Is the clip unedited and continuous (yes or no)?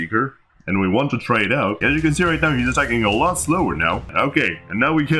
no